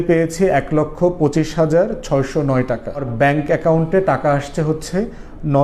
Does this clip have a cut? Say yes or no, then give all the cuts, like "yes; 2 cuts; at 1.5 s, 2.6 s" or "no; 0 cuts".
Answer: yes; 1 cut; at 3.1 s